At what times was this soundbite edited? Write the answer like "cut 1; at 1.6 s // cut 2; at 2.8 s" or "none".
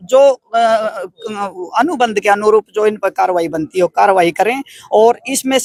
none